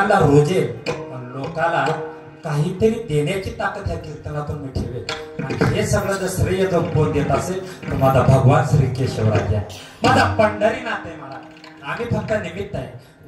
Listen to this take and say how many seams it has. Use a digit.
0